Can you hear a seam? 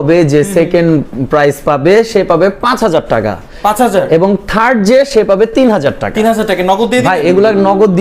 no; 0 cuts

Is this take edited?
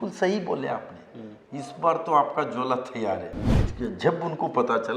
yes; 1 cut; at 3.6 s

